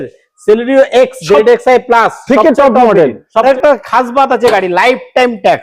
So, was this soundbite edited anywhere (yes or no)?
yes